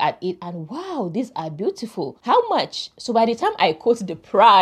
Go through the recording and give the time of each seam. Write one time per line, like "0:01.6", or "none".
0:02.2